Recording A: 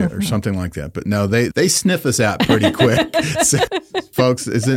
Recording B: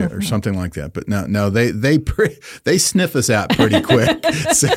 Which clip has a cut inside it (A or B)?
A